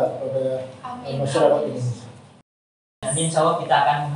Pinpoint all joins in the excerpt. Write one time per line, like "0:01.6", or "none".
0:02.6